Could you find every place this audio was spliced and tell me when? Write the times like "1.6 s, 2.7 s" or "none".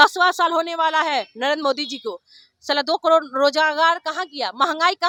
none